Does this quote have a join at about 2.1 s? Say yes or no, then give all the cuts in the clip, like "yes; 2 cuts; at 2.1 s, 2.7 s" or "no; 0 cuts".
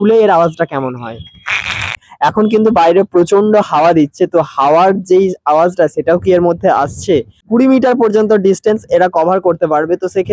yes; 2 cuts; at 2.1 s, 7.4 s